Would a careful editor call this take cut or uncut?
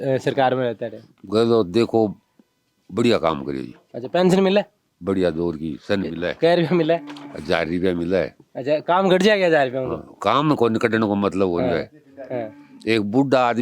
uncut